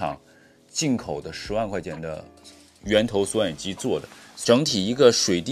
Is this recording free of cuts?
no; 1 cut; at 4.4 s

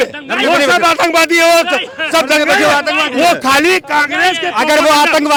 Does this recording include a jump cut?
no; 0 cuts

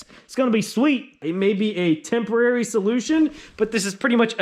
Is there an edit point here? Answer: yes; 1 cut; at 1.2 s

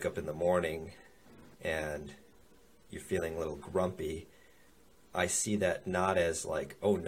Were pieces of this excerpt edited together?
no; 0 cuts

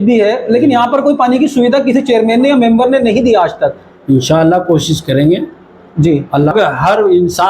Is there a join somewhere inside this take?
yes; 1 cut; at 6.5 s

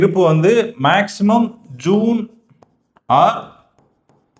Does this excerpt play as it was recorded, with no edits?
yes; 0 cuts

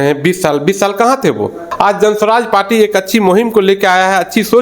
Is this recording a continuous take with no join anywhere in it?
no; 1 cut; at 1.6 s

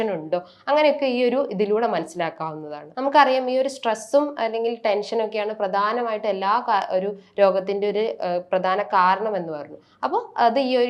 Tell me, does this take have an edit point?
yes; 1 cut; at 2.8 s

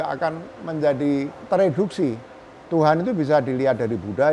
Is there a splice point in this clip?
yes; 1 cut; at 1.4 s

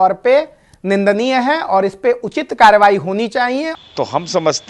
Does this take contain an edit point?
yes; 1 cut; at 3.7 s

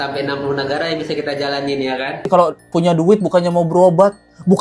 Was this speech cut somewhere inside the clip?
yes; 1 cut; at 2.2 s

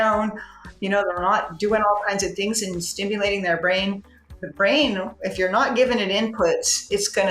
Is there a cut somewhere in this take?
no; 0 cuts

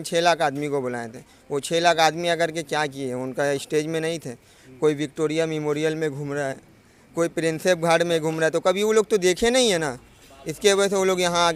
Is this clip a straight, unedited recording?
yes; 0 cuts

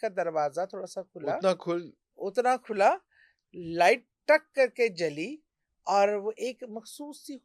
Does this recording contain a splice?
no; 0 cuts

